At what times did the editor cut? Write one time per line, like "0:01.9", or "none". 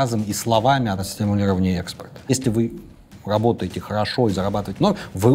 0:01.0
0:02.3